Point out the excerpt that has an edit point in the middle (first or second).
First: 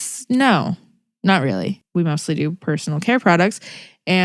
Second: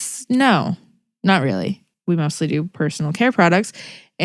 first